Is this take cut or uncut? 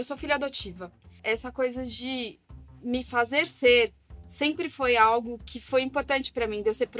cut